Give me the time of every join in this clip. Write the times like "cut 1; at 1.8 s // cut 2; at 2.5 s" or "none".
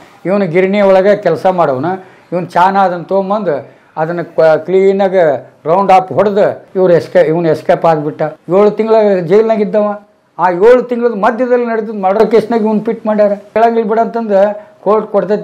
cut 1; at 6.6 s // cut 2; at 8.3 s // cut 3; at 13.5 s

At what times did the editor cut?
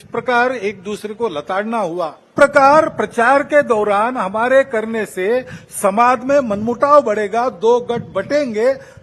cut 1; at 2.3 s

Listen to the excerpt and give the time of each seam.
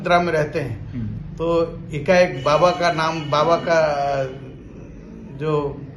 none

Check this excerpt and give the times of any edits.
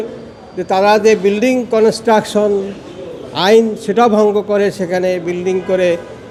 none

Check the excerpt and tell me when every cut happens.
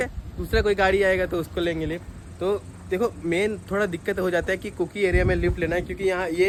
none

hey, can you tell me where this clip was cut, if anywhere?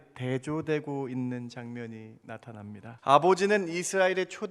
cut 1; at 2.9 s

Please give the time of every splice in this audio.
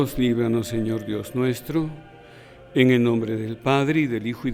none

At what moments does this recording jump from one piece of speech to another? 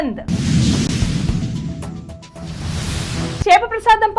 none

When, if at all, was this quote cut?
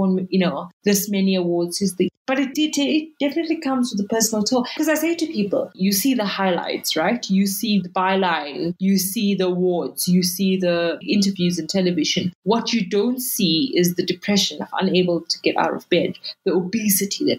cut 1; at 4.7 s

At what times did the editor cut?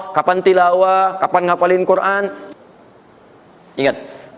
cut 1; at 2.4 s

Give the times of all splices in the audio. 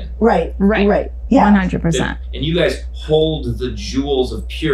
cut 1; at 2.2 s

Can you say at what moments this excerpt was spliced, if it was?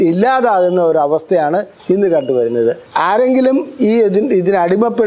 cut 1; at 2.9 s

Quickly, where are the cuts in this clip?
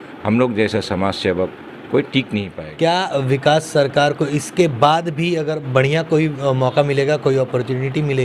cut 1; at 2.6 s

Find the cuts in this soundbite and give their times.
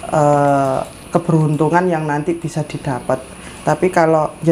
none

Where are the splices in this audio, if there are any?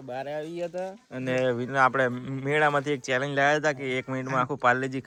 none

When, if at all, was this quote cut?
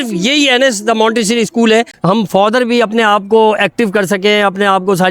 cut 1; at 1.9 s

